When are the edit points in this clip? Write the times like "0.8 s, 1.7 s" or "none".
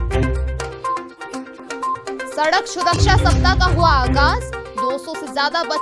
1.2 s